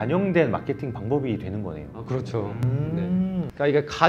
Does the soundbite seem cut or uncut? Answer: uncut